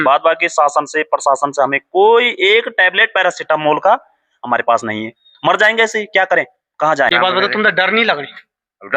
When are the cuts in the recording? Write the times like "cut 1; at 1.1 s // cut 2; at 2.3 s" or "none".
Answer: cut 1; at 7.1 s